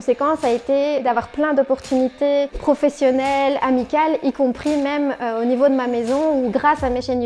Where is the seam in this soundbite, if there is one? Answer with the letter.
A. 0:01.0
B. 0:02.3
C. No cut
A